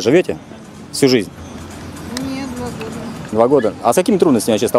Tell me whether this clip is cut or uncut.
uncut